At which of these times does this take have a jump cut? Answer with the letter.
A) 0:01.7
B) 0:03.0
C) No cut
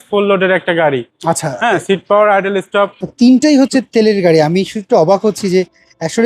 B